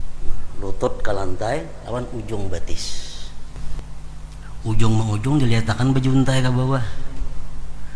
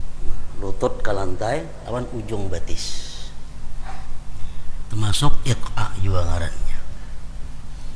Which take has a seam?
first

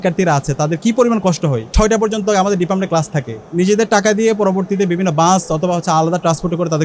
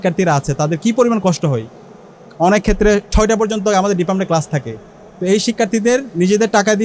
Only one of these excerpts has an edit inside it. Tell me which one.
first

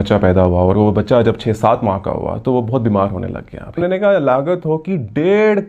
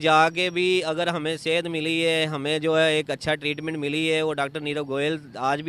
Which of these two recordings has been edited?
first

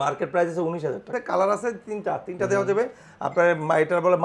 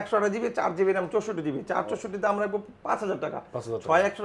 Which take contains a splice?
first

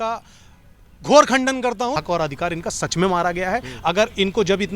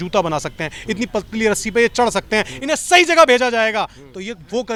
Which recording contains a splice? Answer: first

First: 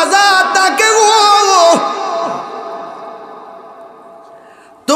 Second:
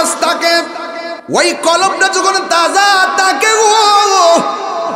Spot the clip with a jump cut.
second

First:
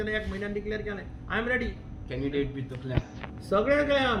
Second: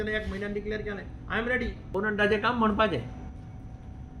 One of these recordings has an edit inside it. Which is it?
second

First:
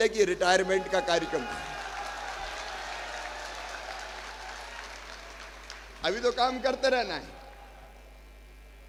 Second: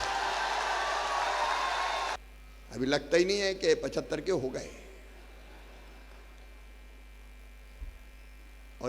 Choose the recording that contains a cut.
second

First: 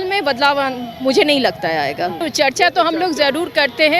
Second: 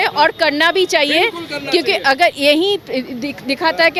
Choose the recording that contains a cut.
first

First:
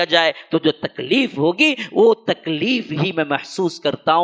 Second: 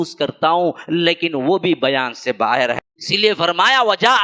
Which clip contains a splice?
second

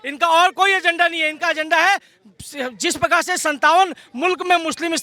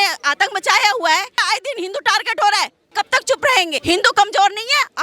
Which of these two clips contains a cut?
second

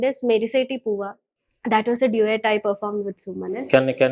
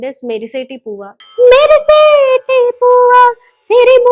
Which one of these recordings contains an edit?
second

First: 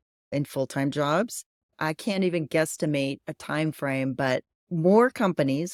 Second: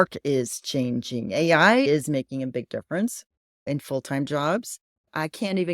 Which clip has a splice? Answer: second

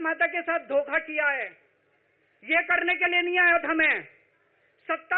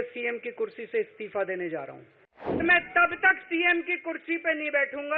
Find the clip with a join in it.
second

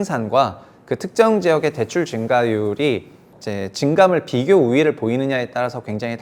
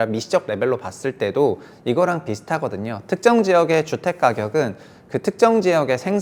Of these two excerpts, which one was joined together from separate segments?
first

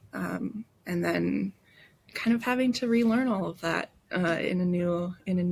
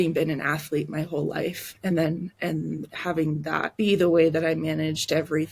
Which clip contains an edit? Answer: second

